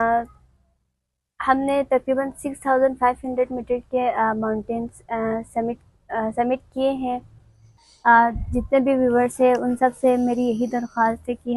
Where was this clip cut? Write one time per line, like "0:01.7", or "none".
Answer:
0:07.7